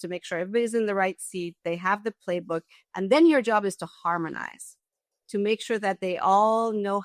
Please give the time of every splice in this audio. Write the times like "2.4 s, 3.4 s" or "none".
none